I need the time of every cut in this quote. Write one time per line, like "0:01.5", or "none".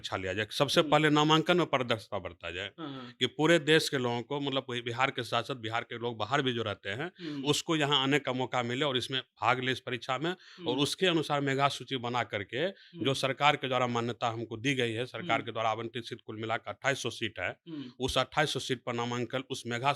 none